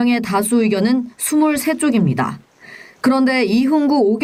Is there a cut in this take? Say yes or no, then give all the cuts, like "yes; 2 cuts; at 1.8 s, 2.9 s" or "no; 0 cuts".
no; 0 cuts